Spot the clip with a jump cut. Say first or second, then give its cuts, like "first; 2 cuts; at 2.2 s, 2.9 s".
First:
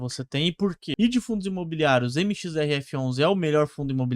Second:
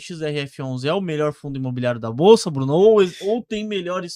first; 1 cut; at 0.9 s